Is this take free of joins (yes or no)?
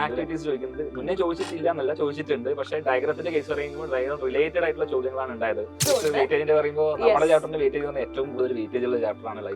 no